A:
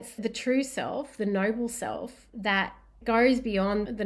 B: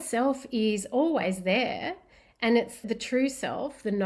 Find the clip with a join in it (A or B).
A